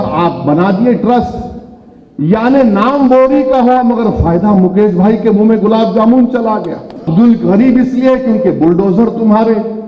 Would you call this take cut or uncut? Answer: cut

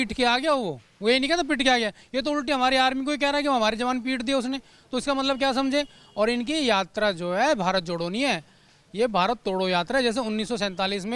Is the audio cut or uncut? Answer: uncut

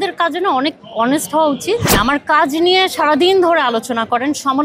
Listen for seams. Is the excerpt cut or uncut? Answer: cut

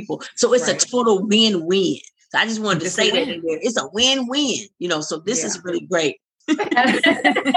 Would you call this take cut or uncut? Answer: cut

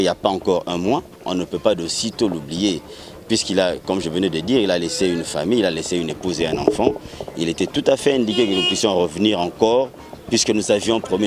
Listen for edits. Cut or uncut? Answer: uncut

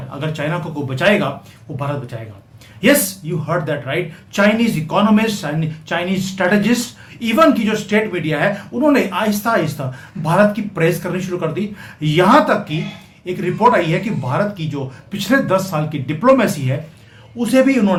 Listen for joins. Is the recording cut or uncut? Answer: uncut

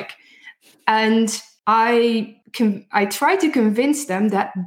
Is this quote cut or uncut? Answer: cut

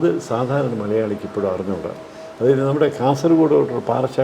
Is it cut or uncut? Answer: uncut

